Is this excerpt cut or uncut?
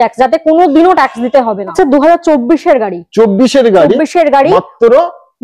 cut